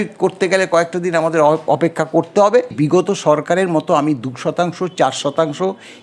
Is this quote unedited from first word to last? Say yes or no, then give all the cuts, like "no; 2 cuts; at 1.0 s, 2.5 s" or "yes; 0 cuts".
no; 1 cut; at 2.7 s